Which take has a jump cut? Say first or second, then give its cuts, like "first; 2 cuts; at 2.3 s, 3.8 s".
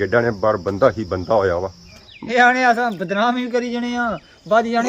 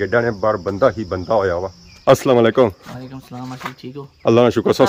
first; 1 cut; at 1.9 s